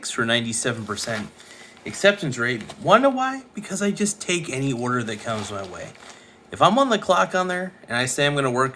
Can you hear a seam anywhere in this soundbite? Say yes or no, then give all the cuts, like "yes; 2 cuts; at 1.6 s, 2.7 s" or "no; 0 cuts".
yes; 2 cuts; at 2.7 s, 6.0 s